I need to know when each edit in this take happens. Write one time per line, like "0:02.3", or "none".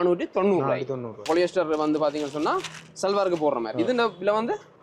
0:01.3